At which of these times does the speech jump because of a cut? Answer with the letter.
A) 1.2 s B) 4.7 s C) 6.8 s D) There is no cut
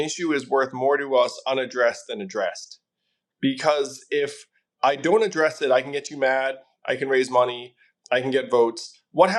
D